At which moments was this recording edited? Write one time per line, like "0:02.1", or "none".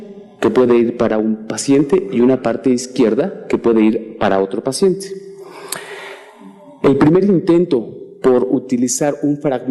none